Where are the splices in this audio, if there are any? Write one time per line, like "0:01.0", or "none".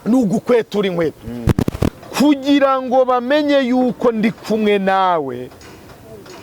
0:01.9